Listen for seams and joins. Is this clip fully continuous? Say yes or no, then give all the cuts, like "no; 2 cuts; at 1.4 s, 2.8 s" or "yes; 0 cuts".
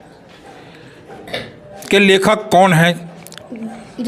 yes; 0 cuts